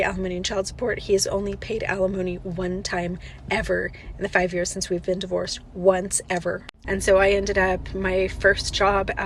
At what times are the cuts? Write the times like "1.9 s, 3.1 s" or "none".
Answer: none